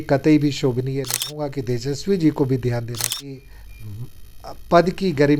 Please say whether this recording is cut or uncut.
cut